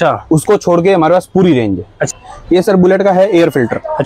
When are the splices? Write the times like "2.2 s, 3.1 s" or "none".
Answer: 2.0 s